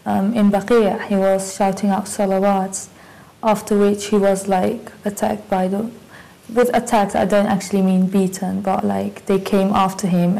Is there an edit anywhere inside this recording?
yes; 1 cut; at 6.8 s

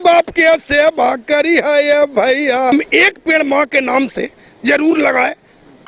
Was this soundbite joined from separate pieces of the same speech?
yes; 1 cut; at 2.7 s

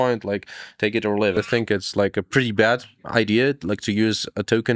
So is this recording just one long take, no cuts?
no; 1 cut; at 1.4 s

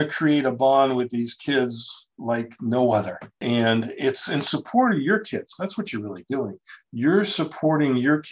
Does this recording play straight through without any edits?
yes; 0 cuts

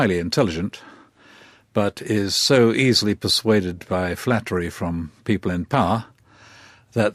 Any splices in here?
no; 0 cuts

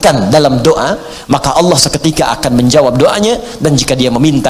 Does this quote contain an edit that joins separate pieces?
no; 0 cuts

